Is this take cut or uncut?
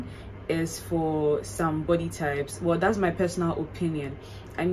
uncut